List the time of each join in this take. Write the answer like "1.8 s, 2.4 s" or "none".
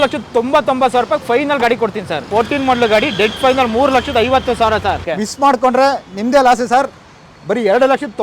2.2 s, 5.0 s